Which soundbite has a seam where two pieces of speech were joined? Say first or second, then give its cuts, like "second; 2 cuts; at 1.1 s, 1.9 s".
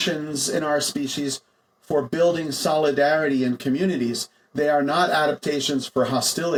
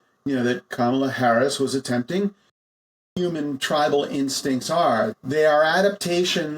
second; 2 cuts; at 2.9 s, 5.1 s